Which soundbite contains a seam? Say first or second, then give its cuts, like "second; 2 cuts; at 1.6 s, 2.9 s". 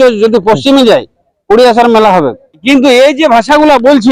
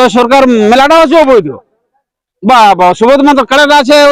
first; 1 cut; at 2.6 s